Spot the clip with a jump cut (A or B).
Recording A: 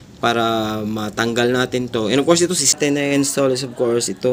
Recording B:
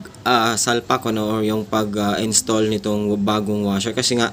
A